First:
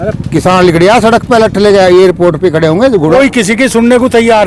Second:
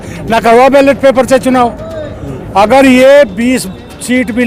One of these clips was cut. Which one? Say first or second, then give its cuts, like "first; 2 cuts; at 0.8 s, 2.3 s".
first; 1 cut; at 3.1 s